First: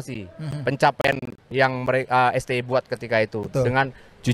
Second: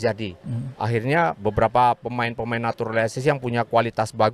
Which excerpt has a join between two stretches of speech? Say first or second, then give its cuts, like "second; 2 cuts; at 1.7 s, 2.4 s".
first; 1 cut; at 1.5 s